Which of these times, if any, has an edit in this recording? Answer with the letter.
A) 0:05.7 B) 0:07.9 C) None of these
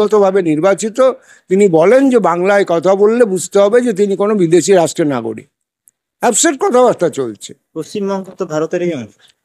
C